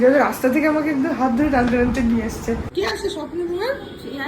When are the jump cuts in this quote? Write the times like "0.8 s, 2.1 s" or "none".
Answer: 2.7 s